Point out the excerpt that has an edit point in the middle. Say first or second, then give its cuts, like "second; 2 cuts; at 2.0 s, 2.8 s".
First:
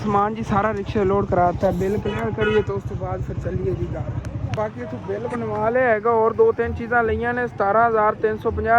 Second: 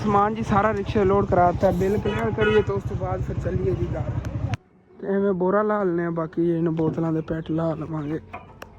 second; 1 cut; at 4.6 s